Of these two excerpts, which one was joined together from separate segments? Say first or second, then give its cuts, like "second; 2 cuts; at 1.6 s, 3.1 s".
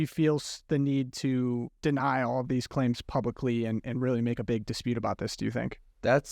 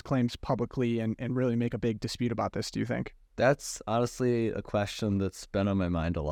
first; 1 cut; at 1.7 s